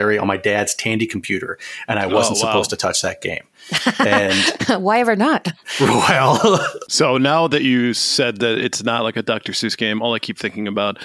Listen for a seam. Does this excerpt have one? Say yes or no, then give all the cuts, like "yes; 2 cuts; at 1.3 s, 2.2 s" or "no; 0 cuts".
yes; 1 cut; at 6.8 s